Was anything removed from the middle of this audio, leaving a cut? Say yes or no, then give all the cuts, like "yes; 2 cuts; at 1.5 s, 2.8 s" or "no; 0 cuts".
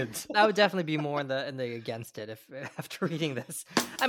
no; 0 cuts